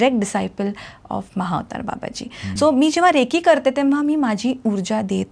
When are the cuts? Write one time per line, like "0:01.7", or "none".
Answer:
0:02.4